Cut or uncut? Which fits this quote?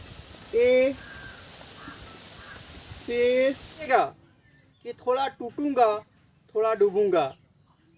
cut